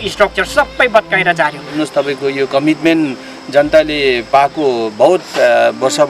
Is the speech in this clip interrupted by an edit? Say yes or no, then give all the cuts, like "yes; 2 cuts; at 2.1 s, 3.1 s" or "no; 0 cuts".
yes; 1 cut; at 1.7 s